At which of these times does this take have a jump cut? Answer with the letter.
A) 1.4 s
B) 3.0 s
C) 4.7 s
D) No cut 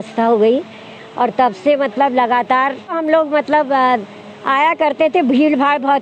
B